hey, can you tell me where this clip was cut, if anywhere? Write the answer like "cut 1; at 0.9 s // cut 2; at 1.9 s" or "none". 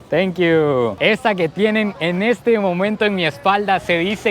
cut 1; at 0.9 s